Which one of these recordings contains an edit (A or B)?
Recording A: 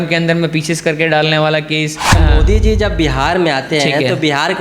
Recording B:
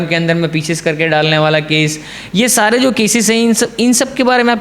A